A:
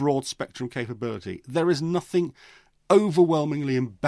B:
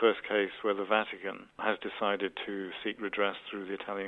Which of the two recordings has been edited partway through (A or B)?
B